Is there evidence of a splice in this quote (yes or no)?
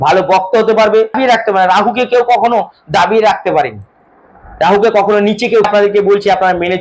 yes